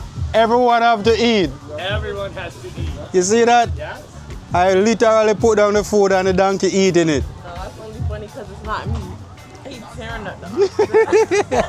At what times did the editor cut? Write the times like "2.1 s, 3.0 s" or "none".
9.7 s